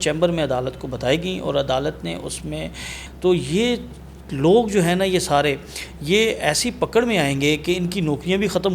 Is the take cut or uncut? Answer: cut